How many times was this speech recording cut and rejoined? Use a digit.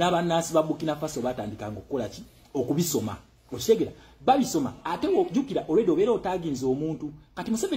1